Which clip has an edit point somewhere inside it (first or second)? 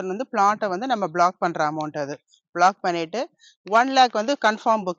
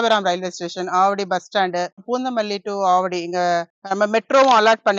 second